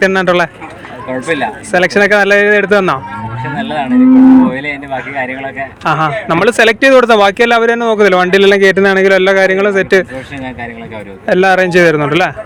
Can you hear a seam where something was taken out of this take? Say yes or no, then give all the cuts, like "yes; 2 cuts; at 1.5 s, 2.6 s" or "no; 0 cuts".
no; 0 cuts